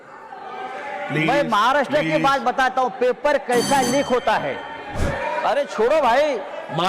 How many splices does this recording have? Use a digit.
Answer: 1